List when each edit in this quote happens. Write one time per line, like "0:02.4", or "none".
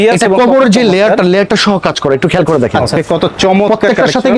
0:02.9